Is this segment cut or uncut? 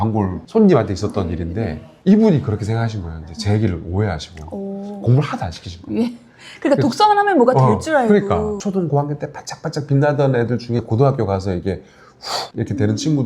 cut